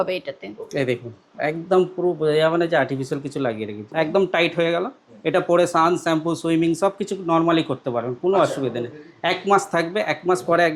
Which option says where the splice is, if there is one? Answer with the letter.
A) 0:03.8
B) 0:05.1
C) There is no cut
A